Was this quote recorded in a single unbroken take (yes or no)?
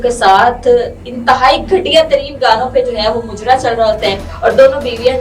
no